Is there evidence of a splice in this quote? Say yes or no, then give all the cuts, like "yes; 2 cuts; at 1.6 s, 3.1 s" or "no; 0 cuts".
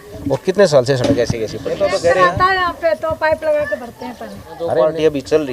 yes; 2 cuts; at 2.0 s, 4.7 s